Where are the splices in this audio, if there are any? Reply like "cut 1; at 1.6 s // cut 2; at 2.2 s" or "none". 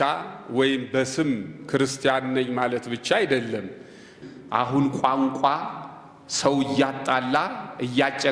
cut 1; at 4.1 s